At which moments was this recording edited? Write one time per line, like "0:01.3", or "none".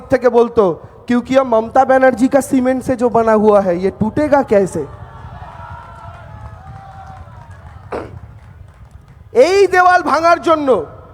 none